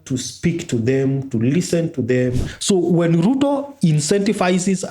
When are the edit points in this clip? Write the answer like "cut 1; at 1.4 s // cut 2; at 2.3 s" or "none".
cut 1; at 2.4 s